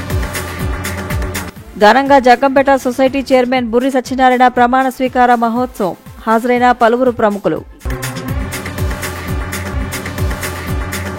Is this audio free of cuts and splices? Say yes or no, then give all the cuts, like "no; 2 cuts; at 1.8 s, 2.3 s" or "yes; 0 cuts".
yes; 0 cuts